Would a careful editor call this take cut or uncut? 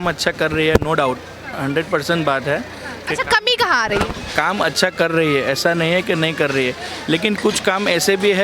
uncut